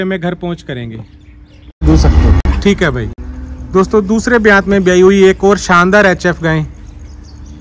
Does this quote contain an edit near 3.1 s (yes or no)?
no